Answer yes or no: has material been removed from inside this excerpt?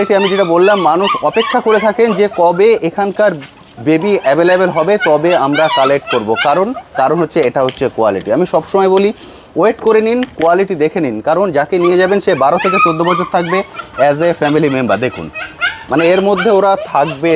no